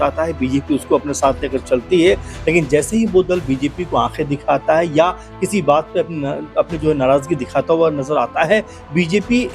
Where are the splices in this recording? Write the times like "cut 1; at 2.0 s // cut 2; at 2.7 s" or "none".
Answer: none